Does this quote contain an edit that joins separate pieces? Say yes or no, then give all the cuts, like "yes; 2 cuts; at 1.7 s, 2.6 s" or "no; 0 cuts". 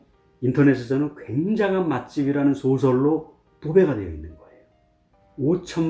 no; 0 cuts